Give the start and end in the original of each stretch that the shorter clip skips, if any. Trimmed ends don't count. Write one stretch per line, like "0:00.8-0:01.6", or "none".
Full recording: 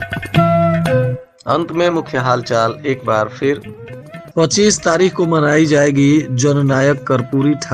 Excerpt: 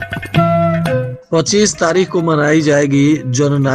0:01.2-0:04.2